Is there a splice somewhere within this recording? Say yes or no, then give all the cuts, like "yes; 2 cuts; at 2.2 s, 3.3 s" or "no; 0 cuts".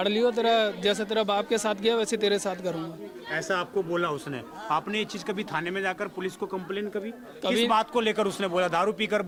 no; 0 cuts